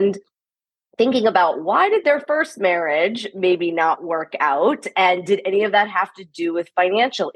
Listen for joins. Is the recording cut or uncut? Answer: uncut